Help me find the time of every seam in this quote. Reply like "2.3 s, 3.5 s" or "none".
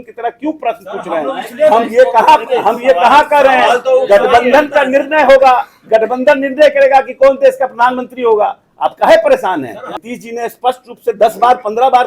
none